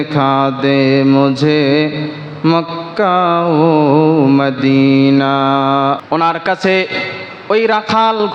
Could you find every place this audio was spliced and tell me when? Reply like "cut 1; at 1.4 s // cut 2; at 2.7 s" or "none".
cut 1; at 6.0 s